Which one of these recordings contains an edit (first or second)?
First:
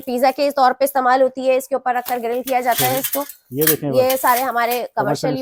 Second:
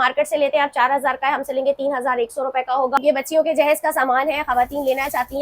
second